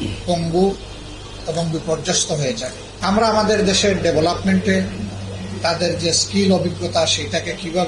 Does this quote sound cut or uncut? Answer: cut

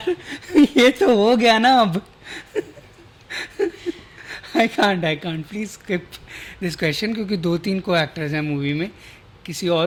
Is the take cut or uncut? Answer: uncut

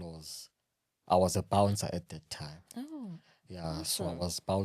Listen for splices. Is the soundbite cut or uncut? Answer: uncut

